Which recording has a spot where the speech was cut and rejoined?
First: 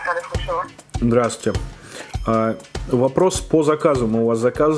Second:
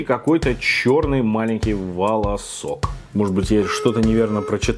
second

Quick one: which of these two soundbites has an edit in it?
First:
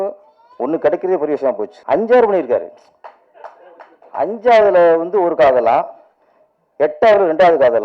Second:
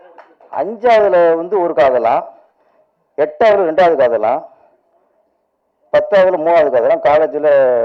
first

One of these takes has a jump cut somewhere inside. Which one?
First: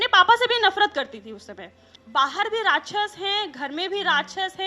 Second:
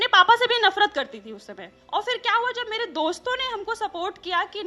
first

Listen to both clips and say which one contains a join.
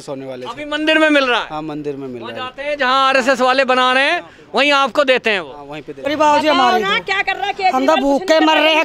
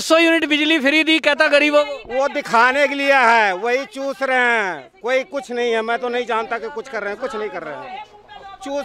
first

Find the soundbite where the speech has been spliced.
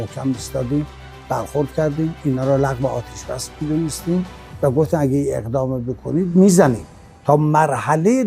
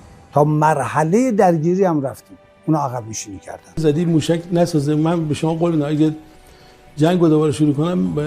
second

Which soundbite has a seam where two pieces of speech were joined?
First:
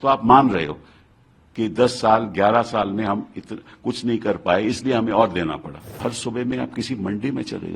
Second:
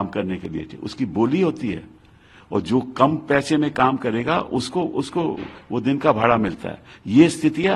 first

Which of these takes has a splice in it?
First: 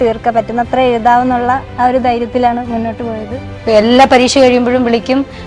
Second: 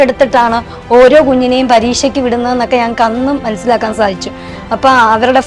first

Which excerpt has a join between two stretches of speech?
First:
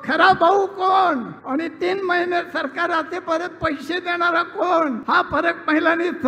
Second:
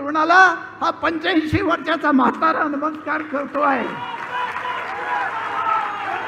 first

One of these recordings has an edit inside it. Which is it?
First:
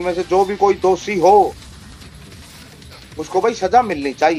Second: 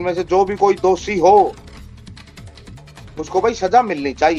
second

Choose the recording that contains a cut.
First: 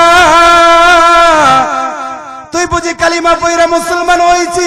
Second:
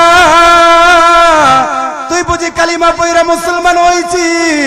second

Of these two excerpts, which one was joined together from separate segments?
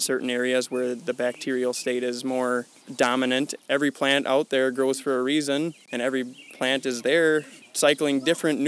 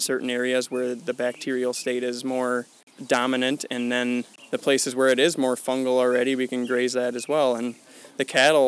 first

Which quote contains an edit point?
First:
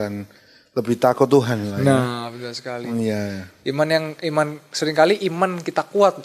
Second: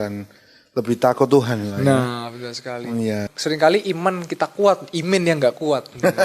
second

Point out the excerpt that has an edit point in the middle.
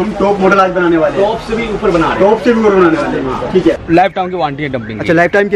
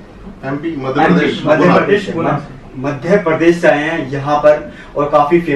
first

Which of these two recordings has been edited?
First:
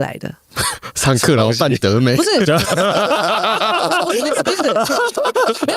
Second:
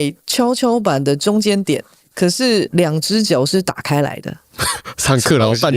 second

